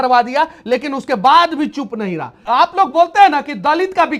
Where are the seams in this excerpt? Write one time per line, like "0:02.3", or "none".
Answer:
0:02.4